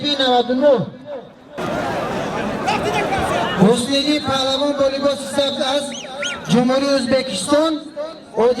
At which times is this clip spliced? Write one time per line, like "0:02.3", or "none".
0:01.6